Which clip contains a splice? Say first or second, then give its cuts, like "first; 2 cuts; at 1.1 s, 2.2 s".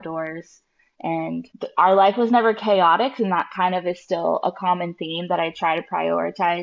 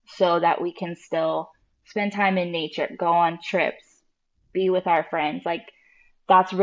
first; 1 cut; at 1.5 s